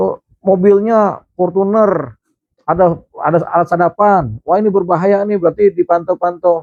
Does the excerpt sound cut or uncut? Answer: uncut